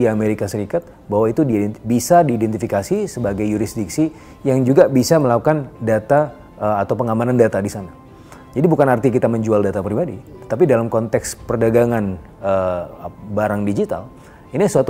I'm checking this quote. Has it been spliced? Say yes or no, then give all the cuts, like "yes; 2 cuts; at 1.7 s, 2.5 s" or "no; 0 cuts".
no; 0 cuts